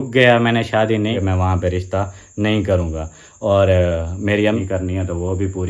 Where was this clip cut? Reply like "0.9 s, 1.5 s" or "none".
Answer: 1.2 s, 4.6 s

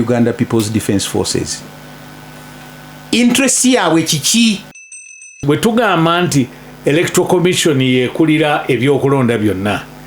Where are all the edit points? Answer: 5.1 s

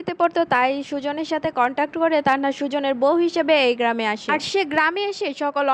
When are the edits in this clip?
4.2 s

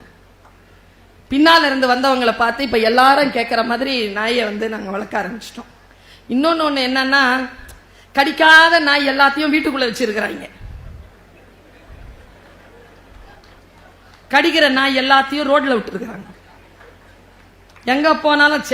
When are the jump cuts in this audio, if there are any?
none

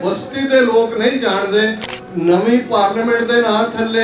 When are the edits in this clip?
1.9 s

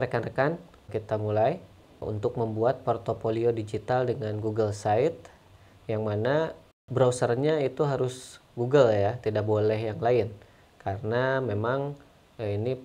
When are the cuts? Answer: 0.9 s, 2.0 s, 6.8 s

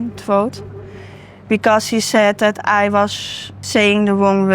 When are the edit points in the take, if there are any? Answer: 3.6 s

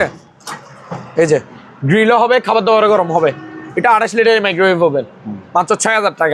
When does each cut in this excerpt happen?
none

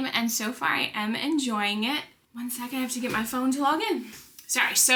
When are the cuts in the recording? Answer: none

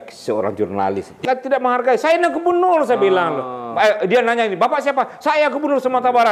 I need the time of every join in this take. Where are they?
1.2 s

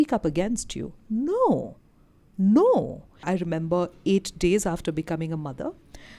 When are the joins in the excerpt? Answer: 3.1 s

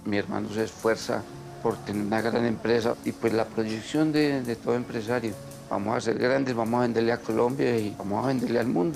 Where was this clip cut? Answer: 2.9 s

